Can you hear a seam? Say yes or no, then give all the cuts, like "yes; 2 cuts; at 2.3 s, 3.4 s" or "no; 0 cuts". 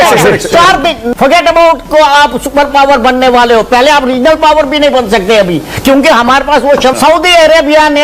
yes; 2 cuts; at 1.0 s, 6.9 s